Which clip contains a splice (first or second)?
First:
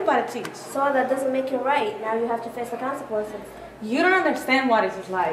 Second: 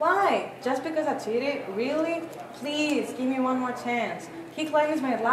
first